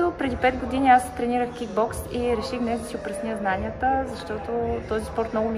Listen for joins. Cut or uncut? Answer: uncut